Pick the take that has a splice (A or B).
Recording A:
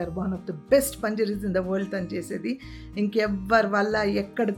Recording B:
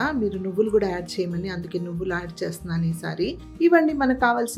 B